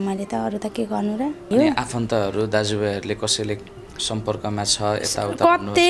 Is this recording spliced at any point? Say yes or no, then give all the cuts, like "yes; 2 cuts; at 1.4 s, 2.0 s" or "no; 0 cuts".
yes; 1 cut; at 1.5 s